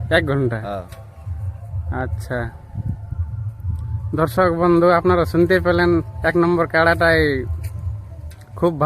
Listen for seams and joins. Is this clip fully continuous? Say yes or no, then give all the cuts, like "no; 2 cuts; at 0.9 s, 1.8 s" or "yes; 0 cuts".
yes; 0 cuts